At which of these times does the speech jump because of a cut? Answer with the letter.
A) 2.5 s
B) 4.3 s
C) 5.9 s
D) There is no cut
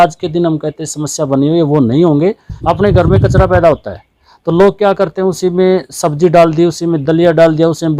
A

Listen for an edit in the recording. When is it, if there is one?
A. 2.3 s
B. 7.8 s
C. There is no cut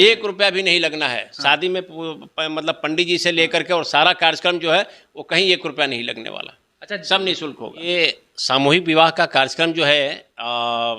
B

